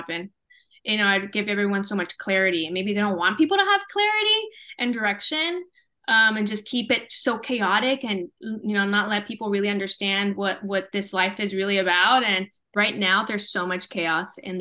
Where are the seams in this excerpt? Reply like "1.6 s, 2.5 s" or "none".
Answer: 12.6 s